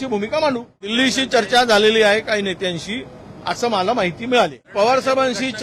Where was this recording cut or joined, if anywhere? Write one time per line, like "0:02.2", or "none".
0:00.9
0:04.7